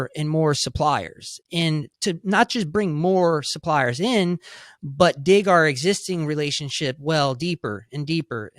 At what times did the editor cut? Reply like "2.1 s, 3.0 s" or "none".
1.9 s